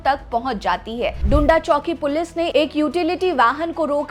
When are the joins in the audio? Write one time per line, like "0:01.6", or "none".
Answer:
0:01.2